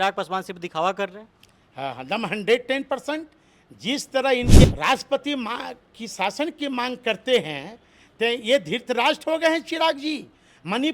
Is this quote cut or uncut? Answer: cut